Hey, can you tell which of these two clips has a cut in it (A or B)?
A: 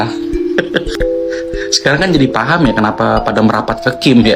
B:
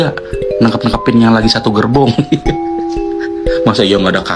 A